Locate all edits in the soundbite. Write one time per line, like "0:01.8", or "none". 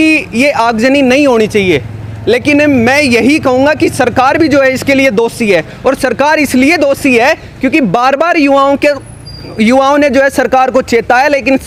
none